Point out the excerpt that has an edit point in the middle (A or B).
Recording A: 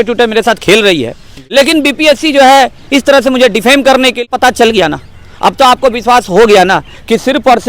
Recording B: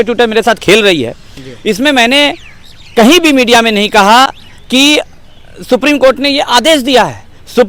A